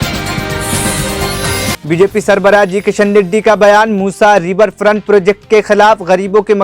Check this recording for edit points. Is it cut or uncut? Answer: cut